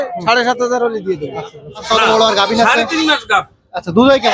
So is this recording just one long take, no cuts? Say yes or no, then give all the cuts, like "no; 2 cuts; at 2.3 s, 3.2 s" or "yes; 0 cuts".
no; 1 cut; at 1.8 s